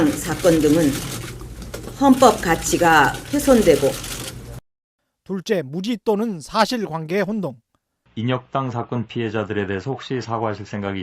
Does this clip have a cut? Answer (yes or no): yes